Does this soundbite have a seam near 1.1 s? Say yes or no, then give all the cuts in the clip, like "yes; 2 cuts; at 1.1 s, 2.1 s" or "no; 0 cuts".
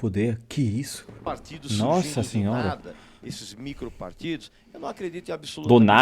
yes; 1 cut; at 1.1 s